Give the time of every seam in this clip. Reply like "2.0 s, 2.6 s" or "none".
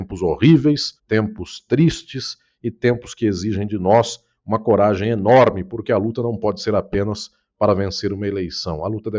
0.9 s